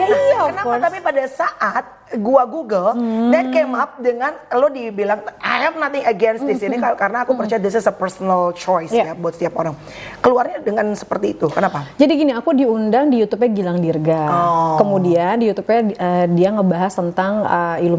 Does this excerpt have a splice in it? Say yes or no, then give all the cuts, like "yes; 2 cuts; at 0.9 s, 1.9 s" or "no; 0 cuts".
no; 0 cuts